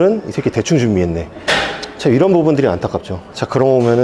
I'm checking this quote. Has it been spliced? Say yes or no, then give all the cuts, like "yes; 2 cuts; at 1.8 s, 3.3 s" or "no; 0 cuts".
no; 0 cuts